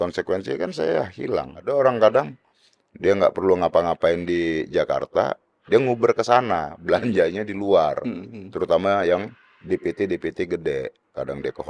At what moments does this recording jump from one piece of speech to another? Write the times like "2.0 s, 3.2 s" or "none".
1.6 s